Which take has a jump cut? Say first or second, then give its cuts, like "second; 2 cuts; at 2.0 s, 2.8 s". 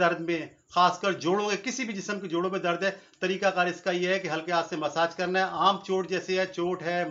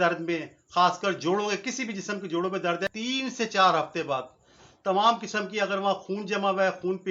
second; 1 cut; at 2.9 s